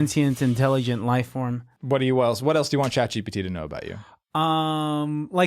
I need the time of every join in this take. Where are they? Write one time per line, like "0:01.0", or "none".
0:01.6